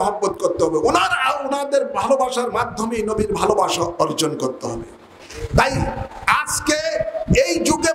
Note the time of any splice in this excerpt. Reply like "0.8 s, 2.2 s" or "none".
none